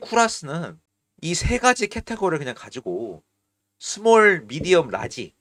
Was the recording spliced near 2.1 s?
no; 0 cuts

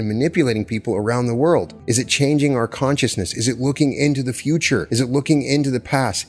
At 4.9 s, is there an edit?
yes; 2 cuts; at 1.8 s, 4.9 s

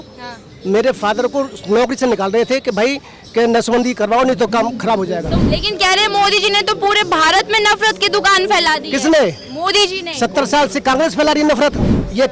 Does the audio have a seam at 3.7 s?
no; 1 cut; at 5.3 s

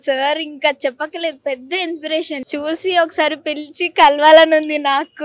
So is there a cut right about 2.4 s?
yes; 1 cut; at 2.4 s

